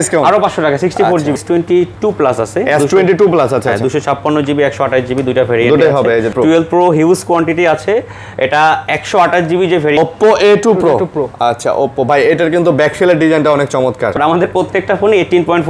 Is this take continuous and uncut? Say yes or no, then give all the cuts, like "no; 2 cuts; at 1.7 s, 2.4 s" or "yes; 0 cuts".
no; 4 cuts; at 1.4 s, 6.3 s, 10.0 s, 14.2 s